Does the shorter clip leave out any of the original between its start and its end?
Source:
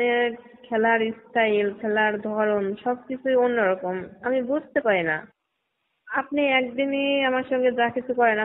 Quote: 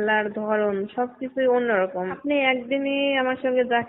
yes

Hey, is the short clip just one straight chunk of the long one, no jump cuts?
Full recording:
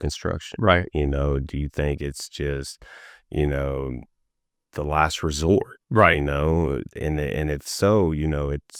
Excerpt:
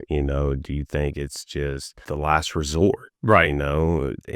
no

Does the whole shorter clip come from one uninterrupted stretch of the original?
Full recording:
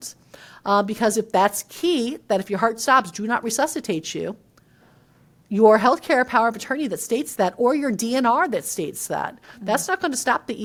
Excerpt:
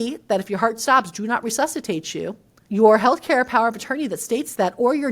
no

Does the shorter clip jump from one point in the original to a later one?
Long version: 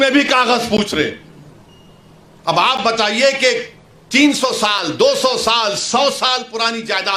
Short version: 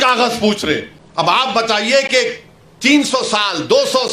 yes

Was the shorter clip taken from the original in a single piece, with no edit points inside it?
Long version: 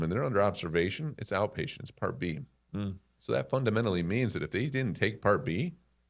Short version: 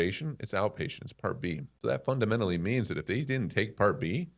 no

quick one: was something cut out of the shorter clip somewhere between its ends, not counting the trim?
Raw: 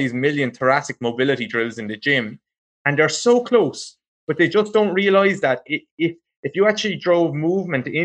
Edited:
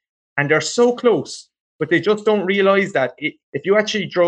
yes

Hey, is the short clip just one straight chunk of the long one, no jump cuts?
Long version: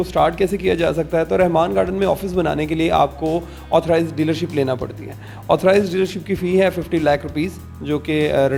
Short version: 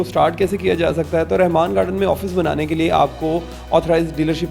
yes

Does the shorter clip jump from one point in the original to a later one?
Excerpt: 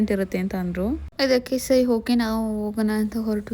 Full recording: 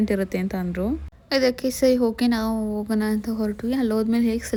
yes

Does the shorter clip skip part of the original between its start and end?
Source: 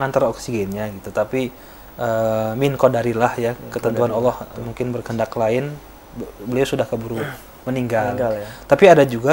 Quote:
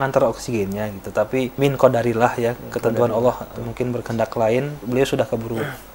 yes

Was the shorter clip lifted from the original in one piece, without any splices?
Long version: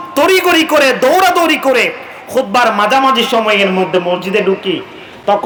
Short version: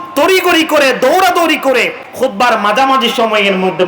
no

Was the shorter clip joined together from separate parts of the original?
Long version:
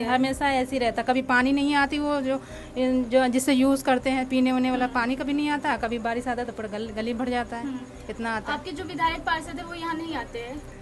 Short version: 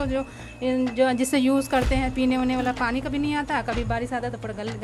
no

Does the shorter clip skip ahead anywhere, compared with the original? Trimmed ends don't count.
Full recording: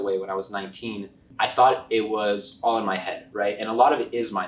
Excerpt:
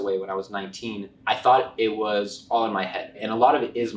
yes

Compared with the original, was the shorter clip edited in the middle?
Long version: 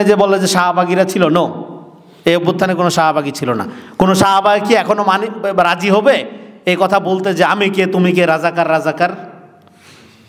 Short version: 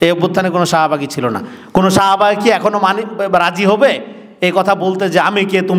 no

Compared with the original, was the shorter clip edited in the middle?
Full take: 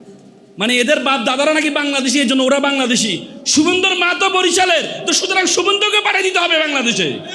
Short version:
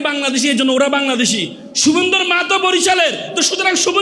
no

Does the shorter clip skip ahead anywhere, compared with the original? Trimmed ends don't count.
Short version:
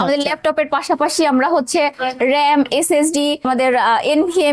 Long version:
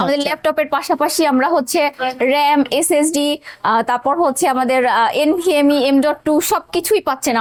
yes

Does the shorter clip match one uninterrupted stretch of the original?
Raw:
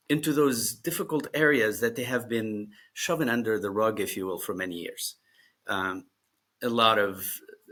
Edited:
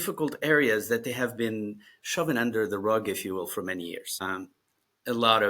no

